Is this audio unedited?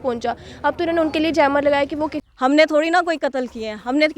no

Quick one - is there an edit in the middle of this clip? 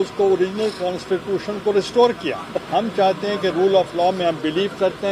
yes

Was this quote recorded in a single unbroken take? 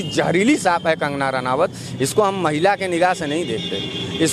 yes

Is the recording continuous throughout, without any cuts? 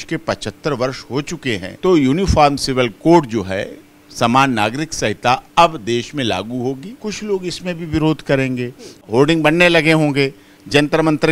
no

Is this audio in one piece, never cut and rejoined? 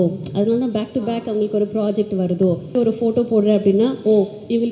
no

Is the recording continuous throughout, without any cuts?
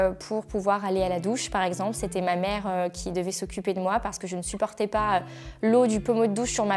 yes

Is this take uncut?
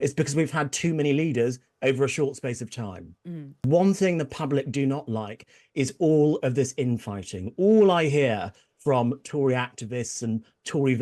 no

